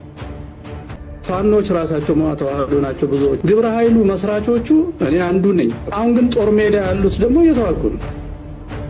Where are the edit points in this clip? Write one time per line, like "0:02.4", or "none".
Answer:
0:01.4